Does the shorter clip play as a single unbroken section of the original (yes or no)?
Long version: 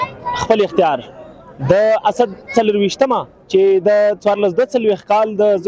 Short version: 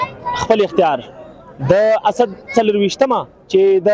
yes